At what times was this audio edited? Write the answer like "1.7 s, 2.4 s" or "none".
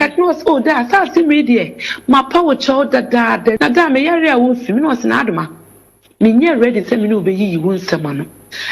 3.6 s